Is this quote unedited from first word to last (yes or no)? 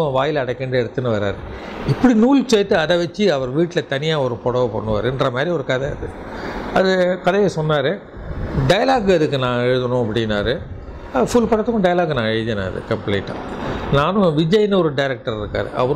yes